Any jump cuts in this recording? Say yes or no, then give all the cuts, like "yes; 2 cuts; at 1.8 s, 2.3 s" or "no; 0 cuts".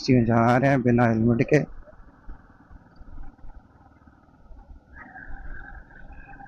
no; 0 cuts